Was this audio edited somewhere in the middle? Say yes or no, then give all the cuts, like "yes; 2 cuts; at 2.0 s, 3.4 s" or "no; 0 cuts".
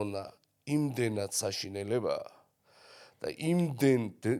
no; 0 cuts